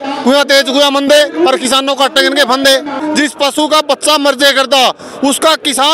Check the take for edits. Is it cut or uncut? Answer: cut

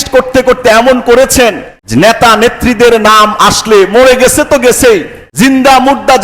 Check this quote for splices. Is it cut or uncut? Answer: cut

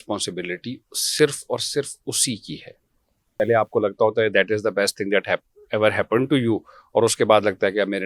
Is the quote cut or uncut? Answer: cut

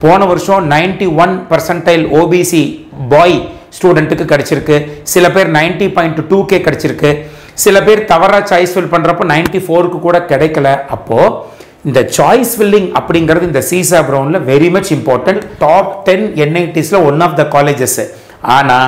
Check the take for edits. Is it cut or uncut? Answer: cut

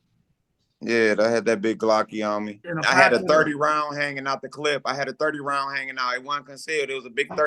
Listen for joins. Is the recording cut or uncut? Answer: cut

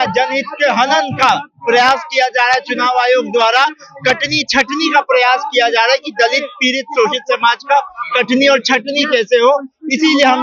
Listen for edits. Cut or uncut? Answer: uncut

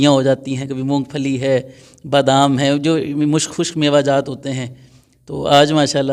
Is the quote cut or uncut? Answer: uncut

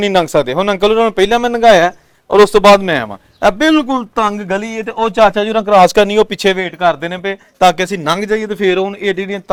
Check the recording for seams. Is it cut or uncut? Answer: uncut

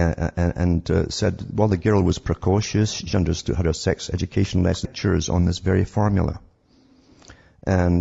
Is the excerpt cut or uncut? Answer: uncut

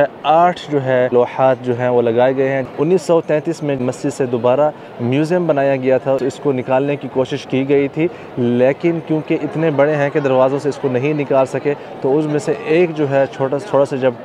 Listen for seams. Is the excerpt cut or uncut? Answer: cut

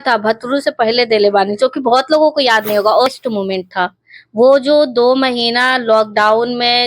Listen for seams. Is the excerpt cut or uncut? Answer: cut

